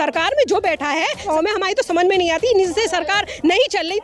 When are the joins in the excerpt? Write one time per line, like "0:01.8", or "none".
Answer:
0:01.3